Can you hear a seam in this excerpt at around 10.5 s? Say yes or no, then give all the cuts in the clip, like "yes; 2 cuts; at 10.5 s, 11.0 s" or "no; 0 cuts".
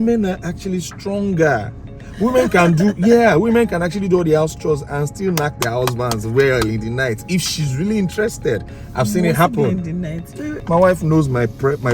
yes; 1 cut; at 10.5 s